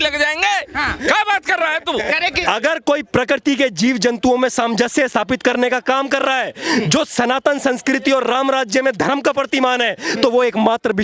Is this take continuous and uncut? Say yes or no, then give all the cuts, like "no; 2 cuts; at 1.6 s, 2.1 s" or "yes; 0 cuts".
no; 1 cut; at 2.4 s